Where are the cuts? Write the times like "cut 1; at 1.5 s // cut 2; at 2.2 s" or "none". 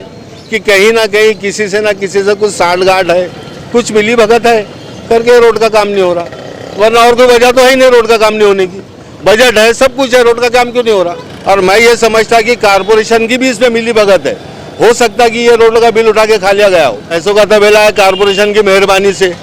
cut 1; at 11.3 s // cut 2; at 17.2 s